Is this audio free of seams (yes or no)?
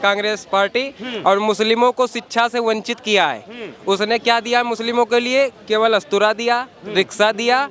yes